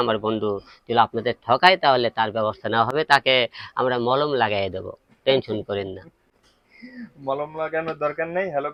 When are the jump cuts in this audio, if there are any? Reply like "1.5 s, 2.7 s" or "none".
none